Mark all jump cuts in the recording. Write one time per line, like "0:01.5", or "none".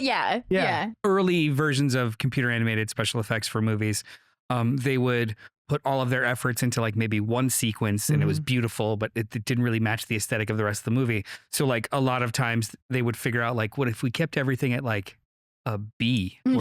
0:00.9